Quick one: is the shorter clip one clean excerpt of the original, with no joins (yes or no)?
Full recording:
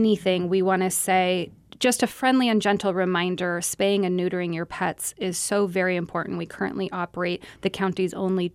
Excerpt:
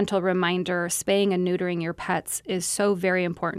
yes